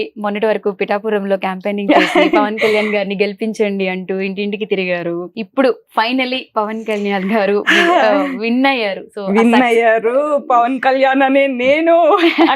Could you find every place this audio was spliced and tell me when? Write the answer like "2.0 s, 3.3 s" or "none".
5.3 s